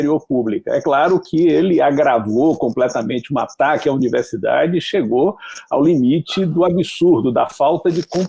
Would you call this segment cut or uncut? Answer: uncut